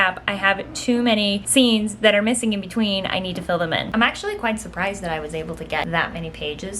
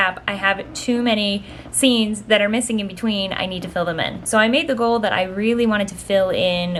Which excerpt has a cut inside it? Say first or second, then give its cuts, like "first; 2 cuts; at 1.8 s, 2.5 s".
first; 3 cuts; at 1.4 s, 3.9 s, 5.9 s